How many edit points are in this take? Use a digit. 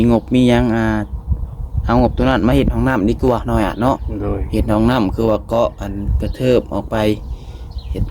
0